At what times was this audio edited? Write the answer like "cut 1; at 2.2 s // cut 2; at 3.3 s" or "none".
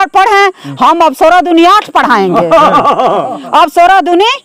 none